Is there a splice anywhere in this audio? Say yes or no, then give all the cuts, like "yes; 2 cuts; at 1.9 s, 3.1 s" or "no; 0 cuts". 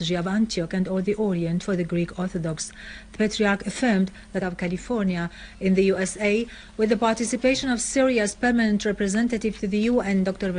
no; 0 cuts